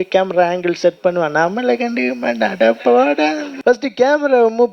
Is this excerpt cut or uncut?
cut